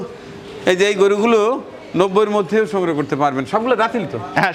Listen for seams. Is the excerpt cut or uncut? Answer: uncut